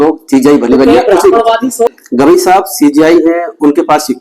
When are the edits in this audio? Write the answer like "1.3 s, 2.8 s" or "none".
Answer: 1.9 s